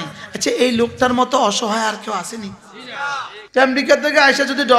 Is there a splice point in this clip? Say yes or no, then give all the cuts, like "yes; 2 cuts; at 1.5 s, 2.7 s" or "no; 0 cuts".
yes; 1 cut; at 3.4 s